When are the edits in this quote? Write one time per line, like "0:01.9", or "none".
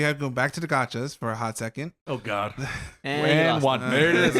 0:02.0
0:02.9